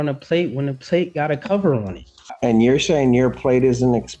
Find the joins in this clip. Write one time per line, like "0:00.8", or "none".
0:02.2